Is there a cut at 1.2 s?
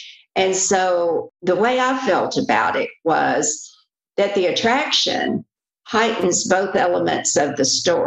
yes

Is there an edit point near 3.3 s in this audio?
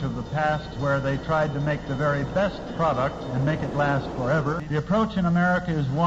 no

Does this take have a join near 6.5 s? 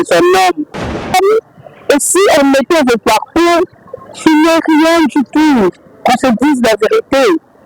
no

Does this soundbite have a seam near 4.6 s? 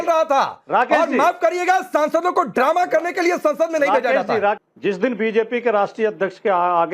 yes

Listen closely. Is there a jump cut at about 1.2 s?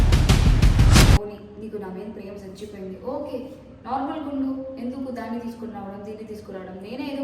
yes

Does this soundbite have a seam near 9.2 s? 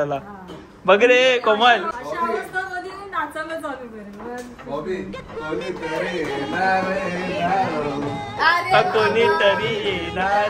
no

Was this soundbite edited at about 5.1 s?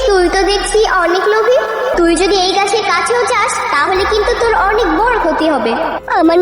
no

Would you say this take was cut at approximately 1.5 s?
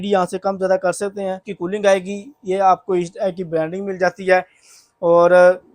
yes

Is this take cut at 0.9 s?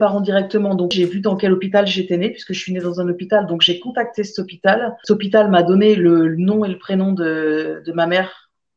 yes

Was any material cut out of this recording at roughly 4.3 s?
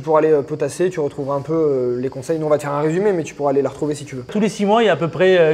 yes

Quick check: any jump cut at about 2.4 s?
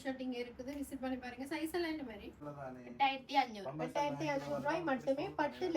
yes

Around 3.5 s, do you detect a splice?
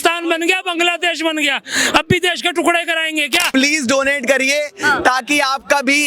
yes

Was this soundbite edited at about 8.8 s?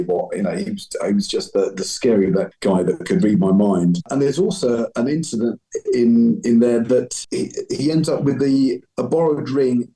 no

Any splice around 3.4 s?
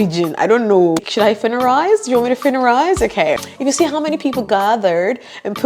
yes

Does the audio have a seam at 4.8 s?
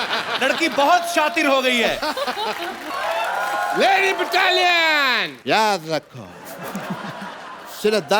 no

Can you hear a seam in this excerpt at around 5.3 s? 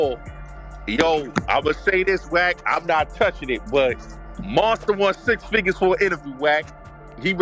no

